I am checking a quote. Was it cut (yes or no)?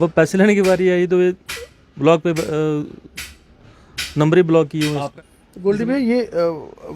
yes